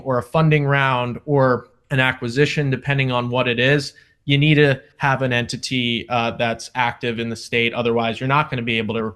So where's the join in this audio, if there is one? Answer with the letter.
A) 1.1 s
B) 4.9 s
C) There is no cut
B